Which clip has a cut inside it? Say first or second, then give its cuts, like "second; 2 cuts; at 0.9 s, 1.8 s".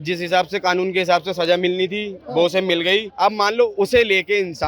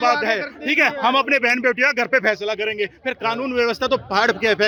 first; 1 cut; at 3.1 s